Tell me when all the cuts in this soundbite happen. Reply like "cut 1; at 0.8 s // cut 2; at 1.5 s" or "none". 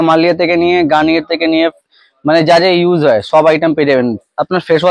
none